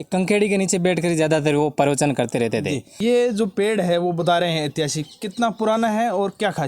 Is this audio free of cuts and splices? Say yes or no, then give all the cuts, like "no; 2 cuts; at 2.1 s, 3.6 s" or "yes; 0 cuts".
no; 1 cut; at 2.9 s